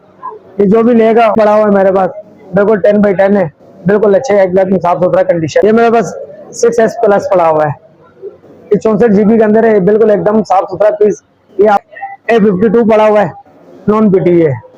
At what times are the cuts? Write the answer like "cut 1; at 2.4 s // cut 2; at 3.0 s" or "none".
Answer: cut 1; at 1.3 s // cut 2; at 5.6 s // cut 3; at 11.8 s

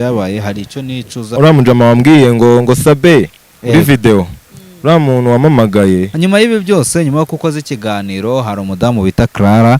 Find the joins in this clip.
cut 1; at 1.3 s // cut 2; at 6.1 s

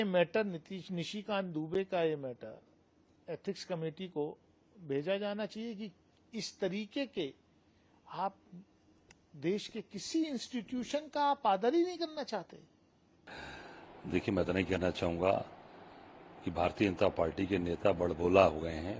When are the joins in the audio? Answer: none

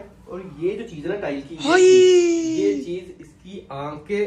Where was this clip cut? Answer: none

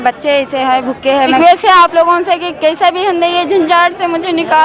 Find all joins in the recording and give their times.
cut 1; at 1.4 s

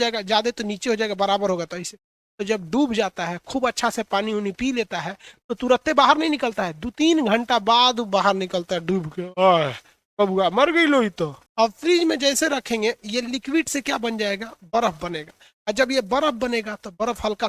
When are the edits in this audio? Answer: cut 1; at 11.4 s

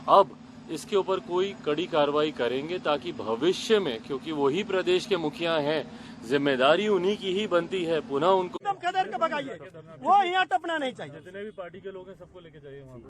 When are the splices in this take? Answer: cut 1; at 8.6 s

